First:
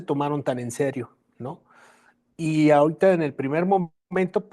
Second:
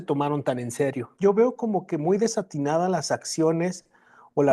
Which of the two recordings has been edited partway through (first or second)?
second